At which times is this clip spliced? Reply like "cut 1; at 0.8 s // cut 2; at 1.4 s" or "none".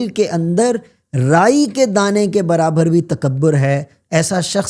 none